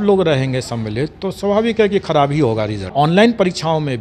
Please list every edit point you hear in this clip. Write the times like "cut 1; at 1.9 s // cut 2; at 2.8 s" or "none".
cut 1; at 2.9 s